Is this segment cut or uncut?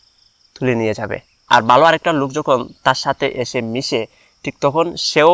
cut